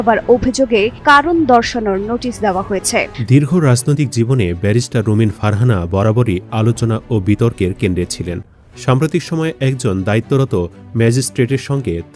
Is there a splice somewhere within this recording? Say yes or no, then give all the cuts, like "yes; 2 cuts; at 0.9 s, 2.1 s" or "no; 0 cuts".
yes; 1 cut; at 3.2 s